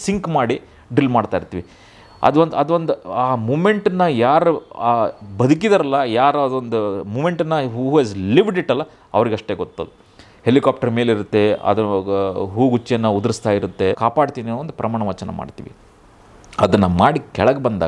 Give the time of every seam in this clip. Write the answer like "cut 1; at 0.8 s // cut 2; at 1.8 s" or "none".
cut 1; at 14.0 s